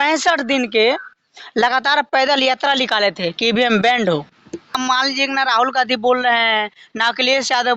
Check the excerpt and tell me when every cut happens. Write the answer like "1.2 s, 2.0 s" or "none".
4.8 s